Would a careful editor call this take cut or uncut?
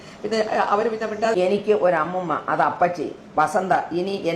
cut